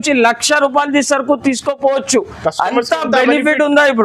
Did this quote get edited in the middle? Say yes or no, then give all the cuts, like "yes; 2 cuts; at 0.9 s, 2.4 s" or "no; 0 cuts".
no; 0 cuts